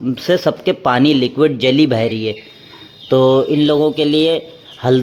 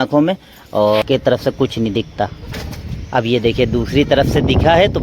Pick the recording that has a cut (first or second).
second